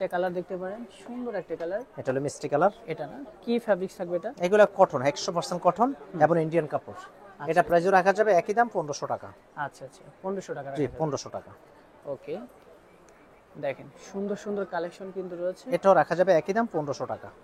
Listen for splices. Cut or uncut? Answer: uncut